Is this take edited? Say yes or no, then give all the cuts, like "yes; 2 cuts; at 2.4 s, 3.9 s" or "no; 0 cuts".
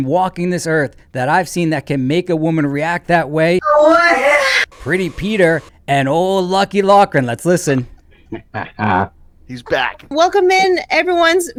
no; 0 cuts